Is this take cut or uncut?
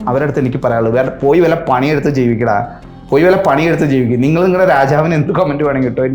uncut